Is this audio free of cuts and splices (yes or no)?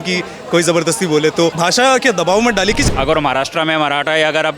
no